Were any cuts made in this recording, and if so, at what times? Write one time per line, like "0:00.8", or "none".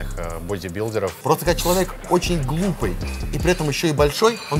0:01.2